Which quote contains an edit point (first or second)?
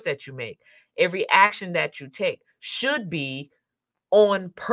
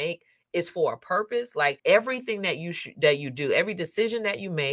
second